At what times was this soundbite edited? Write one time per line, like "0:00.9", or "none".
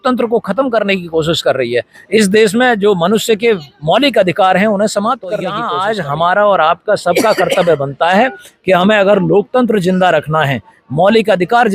0:05.7

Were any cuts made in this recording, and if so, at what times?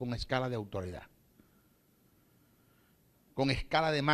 0:01.5

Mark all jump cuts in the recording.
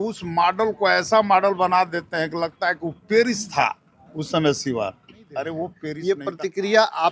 0:05.8

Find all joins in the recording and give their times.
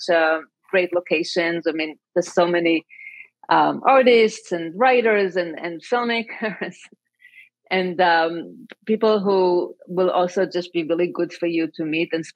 none

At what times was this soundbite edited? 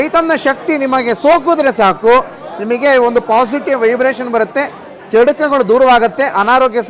none

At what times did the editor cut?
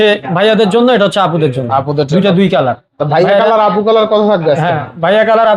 none

